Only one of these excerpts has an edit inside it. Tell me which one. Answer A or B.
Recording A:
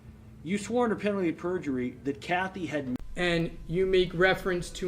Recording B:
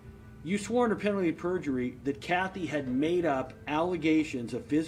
A